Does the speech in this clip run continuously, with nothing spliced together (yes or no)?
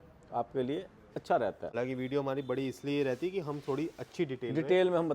no